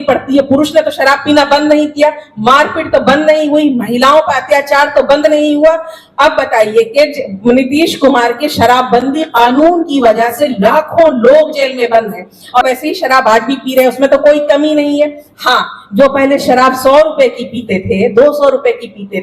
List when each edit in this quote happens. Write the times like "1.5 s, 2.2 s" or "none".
12.6 s